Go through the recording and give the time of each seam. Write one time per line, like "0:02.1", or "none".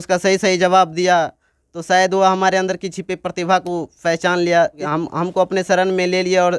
0:04.8